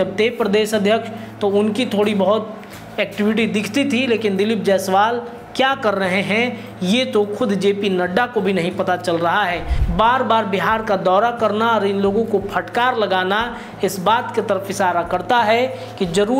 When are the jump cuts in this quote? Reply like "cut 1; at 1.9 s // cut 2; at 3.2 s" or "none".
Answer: cut 1; at 9.7 s